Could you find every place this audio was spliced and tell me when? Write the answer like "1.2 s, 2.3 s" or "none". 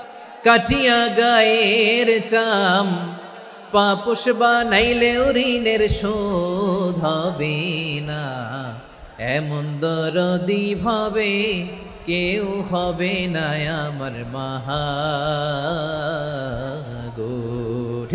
none